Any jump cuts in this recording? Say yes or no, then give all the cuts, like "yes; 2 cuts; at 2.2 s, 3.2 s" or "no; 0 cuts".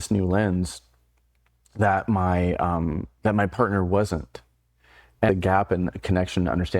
yes; 1 cut; at 5.3 s